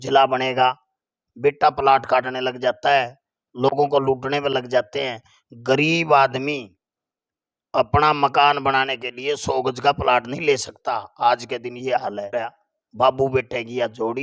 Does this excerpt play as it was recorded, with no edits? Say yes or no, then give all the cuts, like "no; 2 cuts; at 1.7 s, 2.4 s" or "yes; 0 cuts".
no; 1 cut; at 12.3 s